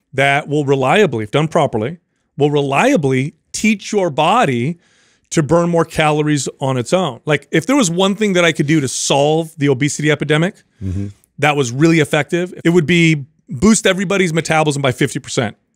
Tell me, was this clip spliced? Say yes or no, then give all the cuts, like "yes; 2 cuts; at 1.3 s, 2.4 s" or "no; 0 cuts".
yes; 1 cut; at 12.5 s